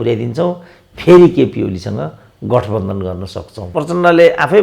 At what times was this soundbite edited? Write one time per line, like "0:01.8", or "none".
0:03.6